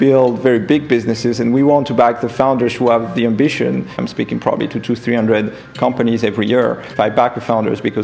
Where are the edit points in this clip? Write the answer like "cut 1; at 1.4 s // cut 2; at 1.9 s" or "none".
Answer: cut 1; at 4.0 s // cut 2; at 6.9 s

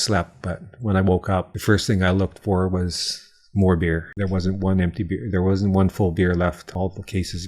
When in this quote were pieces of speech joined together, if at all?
cut 1; at 1.5 s // cut 2; at 4.1 s // cut 3; at 6.6 s

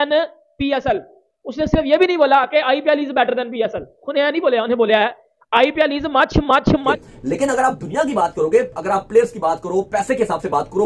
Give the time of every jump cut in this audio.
cut 1; at 7.0 s

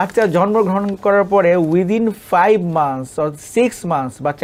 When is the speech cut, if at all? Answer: none

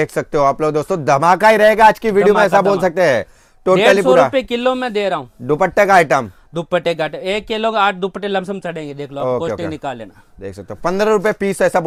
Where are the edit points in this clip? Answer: none

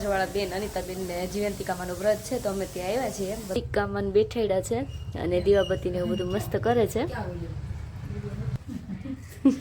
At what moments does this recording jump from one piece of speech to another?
cut 1; at 3.5 s // cut 2; at 8.6 s

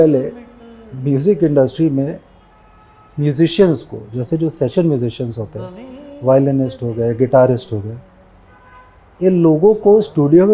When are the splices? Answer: none

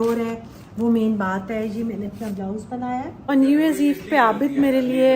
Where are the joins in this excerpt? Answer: cut 1; at 3.1 s

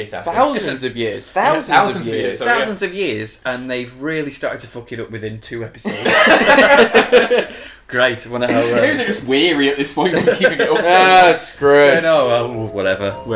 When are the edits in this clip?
none

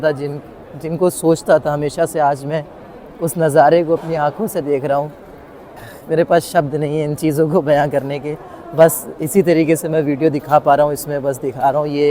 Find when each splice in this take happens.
none

